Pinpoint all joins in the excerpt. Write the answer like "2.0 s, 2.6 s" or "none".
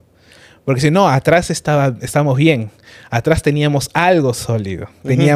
none